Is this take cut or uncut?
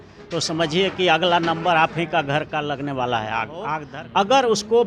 cut